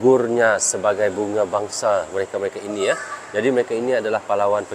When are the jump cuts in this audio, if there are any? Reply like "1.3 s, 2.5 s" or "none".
none